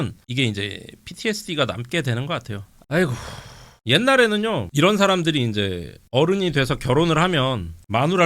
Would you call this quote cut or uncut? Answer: cut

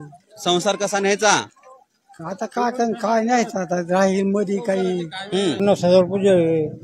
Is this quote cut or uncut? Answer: cut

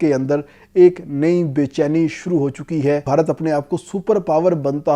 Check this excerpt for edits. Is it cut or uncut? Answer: cut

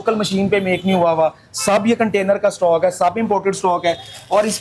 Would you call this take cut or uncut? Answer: uncut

